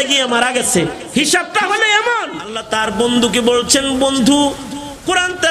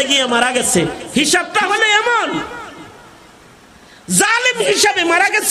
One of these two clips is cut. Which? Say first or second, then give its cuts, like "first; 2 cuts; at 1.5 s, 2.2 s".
first; 1 cut; at 2.6 s